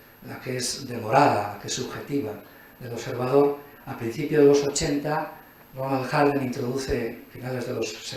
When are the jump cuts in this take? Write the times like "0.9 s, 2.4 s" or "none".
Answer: none